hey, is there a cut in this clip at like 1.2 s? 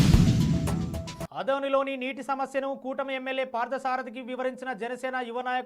yes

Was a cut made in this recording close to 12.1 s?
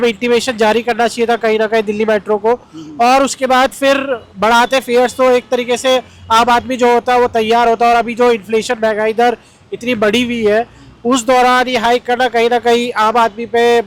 no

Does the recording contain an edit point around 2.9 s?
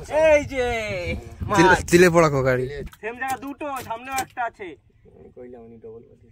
yes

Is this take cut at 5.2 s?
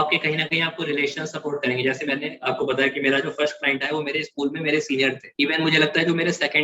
yes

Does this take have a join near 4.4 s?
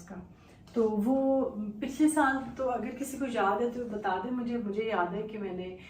no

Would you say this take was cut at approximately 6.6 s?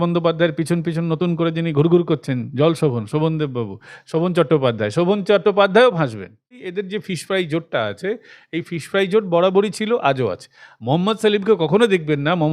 yes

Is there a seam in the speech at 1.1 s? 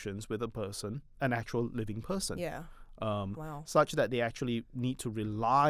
yes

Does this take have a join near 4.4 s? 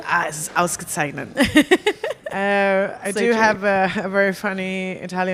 no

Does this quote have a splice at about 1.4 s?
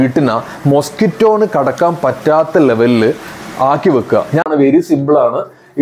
no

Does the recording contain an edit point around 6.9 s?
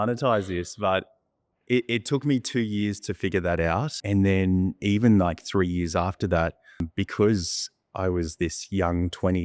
yes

